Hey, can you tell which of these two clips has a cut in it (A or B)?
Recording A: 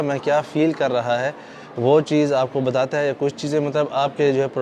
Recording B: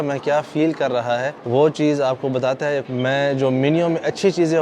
B